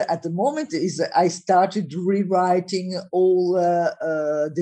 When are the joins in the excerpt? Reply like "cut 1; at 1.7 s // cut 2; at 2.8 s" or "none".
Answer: none